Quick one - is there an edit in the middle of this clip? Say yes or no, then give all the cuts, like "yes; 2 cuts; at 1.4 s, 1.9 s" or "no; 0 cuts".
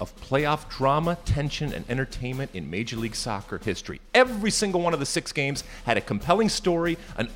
no; 0 cuts